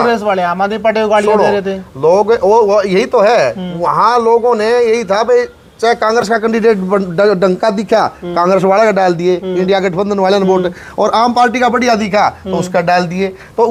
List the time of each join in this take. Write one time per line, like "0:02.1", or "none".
none